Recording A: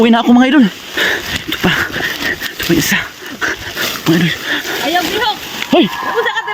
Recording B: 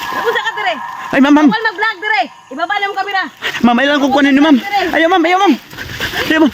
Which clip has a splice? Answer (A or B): A